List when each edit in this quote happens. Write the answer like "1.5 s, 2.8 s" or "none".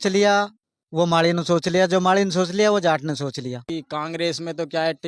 3.7 s